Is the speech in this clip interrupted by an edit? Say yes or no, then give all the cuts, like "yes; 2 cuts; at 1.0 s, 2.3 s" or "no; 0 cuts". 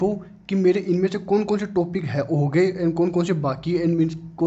no; 0 cuts